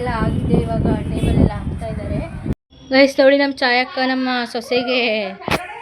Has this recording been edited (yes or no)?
yes